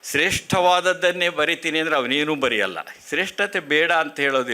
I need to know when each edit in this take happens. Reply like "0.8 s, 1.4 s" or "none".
3.0 s

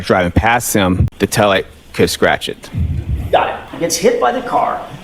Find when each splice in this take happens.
1.1 s, 3.7 s

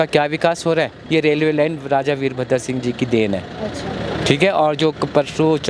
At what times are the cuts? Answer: 1.0 s

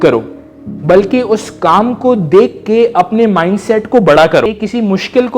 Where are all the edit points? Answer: 4.5 s

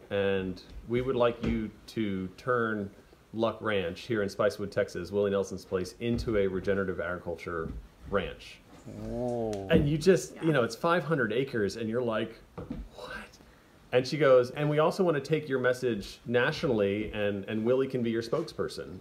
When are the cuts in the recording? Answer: 13.2 s, 14.5 s, 16.1 s

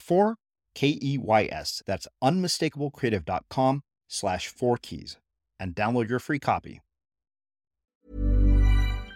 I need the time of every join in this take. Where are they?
8.0 s

